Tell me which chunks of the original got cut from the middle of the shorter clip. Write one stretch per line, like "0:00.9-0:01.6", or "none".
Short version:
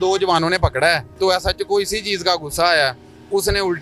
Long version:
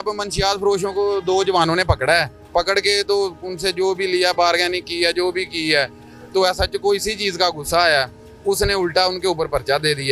0:02.3-0:06.2